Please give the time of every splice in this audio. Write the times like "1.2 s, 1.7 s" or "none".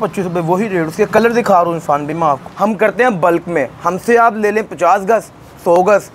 2.5 s